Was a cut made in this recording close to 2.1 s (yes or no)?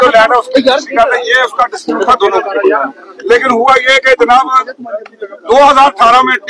yes